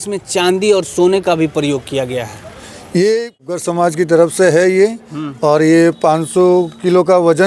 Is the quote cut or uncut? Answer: cut